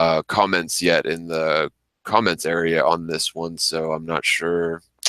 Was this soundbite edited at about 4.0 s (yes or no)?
no